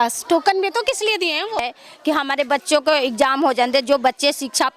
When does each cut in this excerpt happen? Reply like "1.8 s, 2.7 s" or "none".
1.6 s